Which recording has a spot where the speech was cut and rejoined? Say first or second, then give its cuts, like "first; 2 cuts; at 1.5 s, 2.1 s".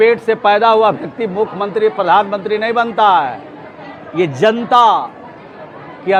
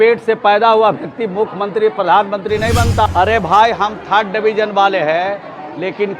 second; 1 cut; at 3.1 s